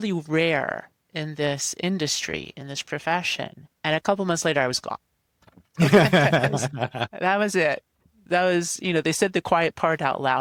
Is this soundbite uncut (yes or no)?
yes